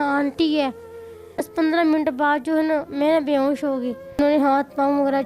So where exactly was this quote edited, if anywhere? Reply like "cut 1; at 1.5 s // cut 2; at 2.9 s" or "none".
cut 1; at 1.4 s // cut 2; at 4.2 s